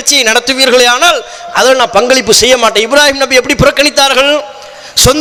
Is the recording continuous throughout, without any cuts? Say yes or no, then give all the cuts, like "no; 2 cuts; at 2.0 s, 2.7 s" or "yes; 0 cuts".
yes; 0 cuts